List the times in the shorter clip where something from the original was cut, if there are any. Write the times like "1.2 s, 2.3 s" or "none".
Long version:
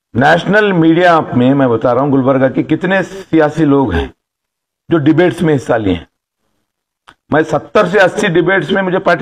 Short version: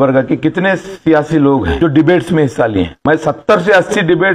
1.7 s, 2.9 s